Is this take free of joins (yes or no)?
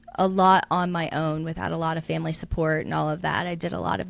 yes